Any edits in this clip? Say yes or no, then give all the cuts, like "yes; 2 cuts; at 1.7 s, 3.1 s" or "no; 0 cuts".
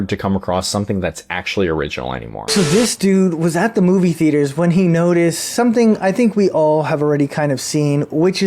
yes; 1 cut; at 2.4 s